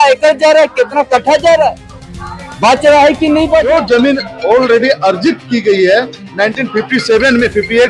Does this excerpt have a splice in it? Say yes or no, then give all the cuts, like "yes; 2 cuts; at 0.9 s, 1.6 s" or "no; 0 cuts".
yes; 1 cut; at 3.7 s